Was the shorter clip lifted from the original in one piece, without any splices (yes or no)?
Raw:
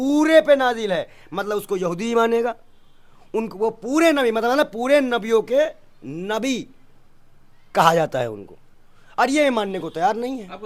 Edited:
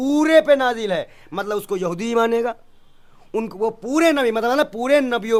yes